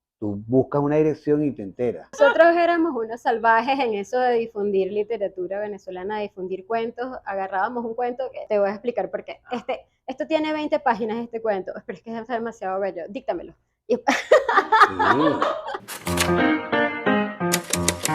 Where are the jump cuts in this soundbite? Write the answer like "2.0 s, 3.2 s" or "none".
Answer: 2.2 s, 8.4 s, 15.9 s